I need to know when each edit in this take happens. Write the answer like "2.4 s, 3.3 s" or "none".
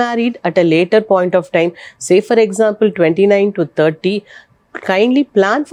none